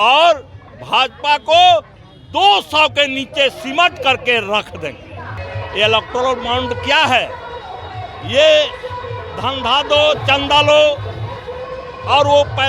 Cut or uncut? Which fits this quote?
cut